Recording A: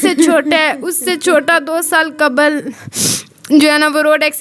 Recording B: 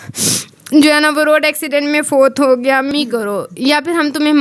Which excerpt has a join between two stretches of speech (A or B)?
B